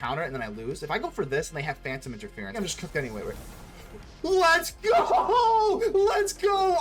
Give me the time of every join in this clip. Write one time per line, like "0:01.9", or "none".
0:02.6